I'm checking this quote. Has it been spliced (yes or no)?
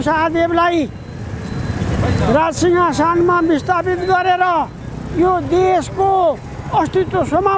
no